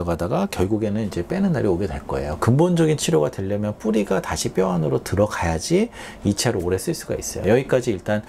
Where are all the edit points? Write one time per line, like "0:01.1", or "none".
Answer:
0:02.3
0:07.4